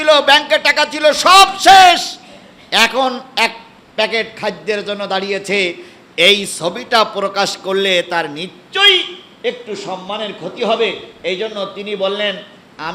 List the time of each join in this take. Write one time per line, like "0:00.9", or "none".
none